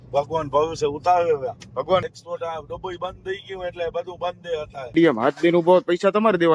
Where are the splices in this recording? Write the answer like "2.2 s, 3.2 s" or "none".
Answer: 2.1 s, 4.9 s